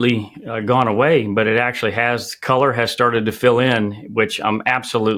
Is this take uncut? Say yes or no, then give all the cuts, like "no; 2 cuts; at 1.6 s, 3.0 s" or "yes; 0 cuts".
yes; 0 cuts